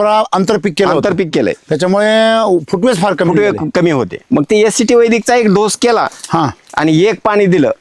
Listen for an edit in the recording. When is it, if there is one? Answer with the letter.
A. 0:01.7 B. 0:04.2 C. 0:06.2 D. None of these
B